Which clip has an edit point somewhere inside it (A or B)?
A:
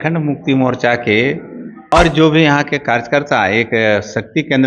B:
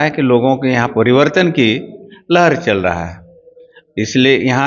A